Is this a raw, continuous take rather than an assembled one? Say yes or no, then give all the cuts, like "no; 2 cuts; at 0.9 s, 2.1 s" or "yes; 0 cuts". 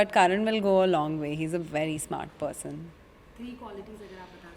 yes; 0 cuts